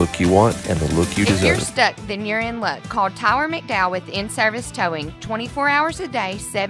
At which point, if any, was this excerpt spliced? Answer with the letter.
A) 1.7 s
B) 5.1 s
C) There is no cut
A